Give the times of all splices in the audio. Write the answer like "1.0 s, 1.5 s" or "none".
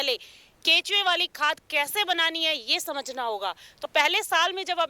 3.9 s